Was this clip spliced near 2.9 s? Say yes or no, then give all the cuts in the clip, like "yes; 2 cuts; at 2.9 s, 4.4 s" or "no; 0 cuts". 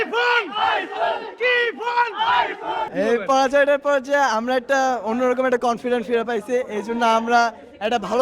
yes; 1 cut; at 2.9 s